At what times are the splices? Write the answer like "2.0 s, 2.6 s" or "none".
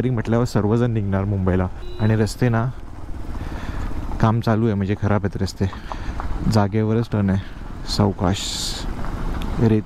1.8 s, 5.9 s